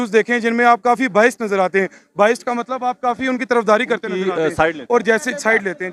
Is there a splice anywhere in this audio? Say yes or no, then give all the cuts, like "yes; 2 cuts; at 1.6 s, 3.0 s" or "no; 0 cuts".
no; 0 cuts